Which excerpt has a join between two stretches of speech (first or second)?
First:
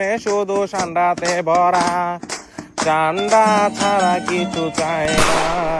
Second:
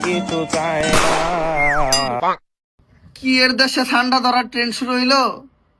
second